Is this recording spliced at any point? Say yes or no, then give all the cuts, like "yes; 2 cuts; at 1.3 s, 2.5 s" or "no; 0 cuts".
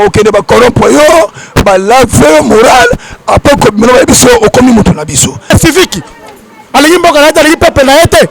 yes; 1 cut; at 5.5 s